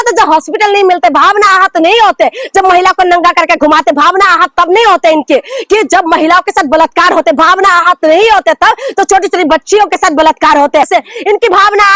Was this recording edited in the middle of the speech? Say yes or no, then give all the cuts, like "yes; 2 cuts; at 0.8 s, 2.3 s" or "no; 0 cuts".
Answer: yes; 1 cut; at 10.9 s